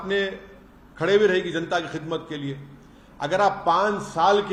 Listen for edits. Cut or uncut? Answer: uncut